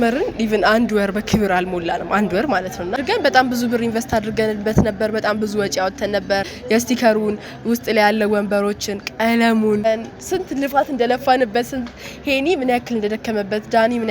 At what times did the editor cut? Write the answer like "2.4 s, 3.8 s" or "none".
2.9 s, 6.5 s, 9.9 s